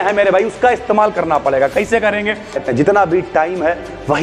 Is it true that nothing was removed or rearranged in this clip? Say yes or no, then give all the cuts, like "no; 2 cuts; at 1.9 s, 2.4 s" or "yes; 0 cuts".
no; 1 cut; at 2.6 s